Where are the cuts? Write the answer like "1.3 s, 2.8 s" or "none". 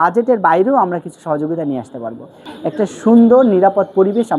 2.3 s

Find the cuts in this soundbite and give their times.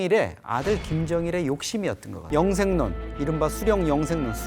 2.2 s

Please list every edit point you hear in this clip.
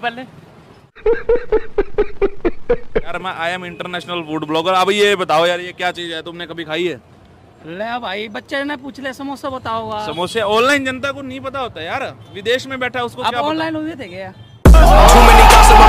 3.1 s

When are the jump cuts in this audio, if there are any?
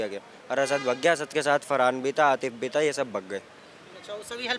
none

